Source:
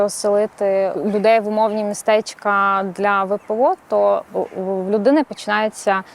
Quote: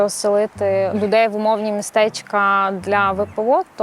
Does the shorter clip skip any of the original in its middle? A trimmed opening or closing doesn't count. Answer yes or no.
yes